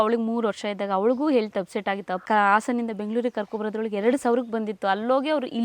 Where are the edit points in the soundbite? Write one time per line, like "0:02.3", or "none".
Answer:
0:02.2